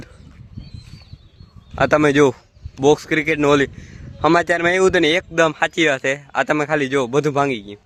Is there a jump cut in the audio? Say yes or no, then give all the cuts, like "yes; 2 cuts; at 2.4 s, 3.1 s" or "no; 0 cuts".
no; 0 cuts